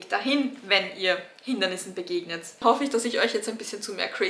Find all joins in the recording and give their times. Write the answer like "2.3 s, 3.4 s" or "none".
2.6 s